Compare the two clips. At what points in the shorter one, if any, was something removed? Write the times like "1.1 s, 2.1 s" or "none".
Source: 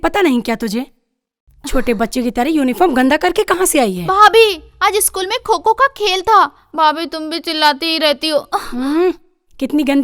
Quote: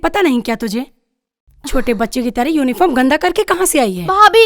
none